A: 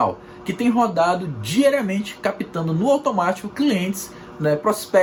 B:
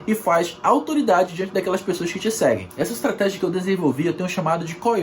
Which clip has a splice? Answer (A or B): B